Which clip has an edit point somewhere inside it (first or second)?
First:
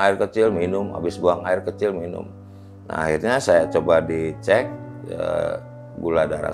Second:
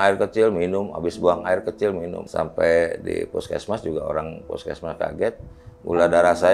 second